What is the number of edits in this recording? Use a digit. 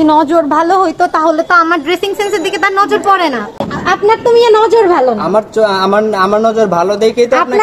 1